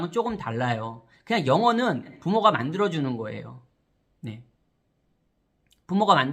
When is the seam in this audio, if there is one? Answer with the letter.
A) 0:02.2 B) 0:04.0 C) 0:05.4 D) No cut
A